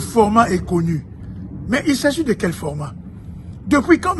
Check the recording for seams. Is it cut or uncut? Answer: uncut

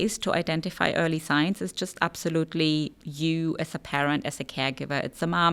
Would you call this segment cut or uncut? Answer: uncut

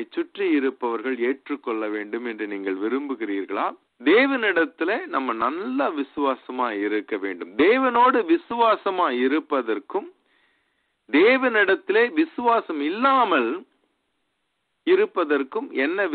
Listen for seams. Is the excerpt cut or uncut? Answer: cut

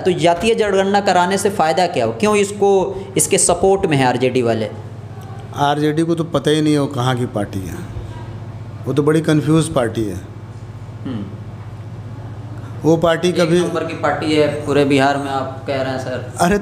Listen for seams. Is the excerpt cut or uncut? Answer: uncut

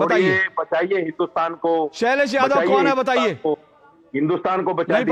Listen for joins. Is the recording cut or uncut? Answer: uncut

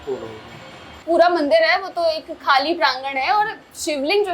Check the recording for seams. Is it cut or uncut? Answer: cut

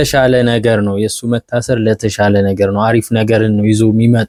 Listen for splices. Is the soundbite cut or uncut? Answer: uncut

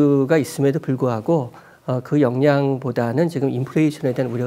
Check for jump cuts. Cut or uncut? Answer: uncut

